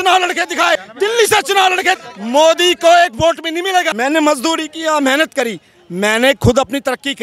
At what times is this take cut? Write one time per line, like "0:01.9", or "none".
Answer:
0:00.9
0:02.0
0:03.9

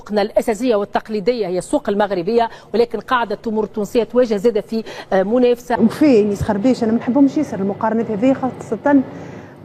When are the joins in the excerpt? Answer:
0:05.7

